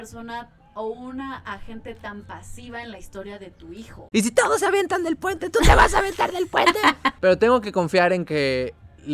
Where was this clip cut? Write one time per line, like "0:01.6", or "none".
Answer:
0:04.0
0:07.2